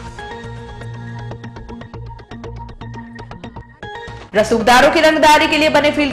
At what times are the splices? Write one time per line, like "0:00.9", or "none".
0:04.3